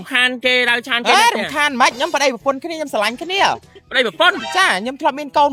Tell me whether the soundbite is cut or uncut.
uncut